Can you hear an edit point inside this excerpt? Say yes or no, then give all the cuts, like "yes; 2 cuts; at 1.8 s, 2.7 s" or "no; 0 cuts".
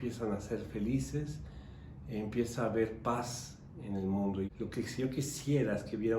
yes; 1 cut; at 4.5 s